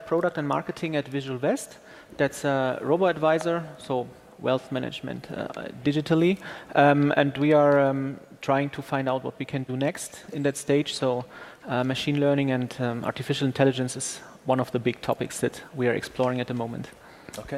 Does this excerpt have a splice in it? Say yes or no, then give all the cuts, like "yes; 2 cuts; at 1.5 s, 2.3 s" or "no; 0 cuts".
yes; 1 cut; at 6.3 s